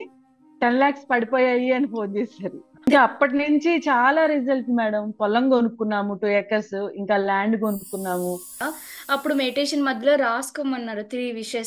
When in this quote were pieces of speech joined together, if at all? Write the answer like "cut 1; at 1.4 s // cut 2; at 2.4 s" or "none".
cut 1; at 2.9 s // cut 2; at 8.6 s